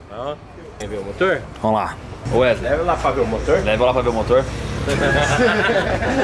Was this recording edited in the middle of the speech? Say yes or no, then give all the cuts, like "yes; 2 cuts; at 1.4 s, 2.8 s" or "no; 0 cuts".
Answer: yes; 2 cuts; at 0.8 s, 2.1 s